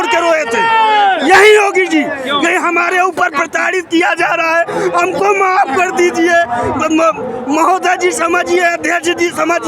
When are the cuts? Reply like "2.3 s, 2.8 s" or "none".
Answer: none